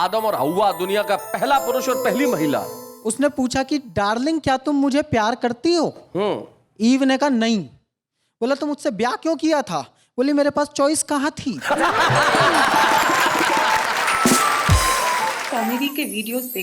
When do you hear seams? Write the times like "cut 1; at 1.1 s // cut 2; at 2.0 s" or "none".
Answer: cut 1; at 15.4 s

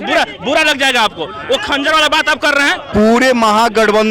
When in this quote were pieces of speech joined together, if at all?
cut 1; at 2.8 s

